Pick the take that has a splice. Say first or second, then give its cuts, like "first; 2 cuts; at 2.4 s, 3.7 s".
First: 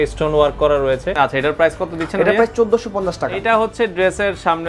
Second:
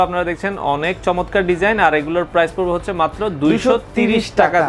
first; 2 cuts; at 1.1 s, 3.4 s